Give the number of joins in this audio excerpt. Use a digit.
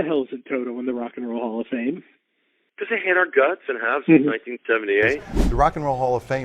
1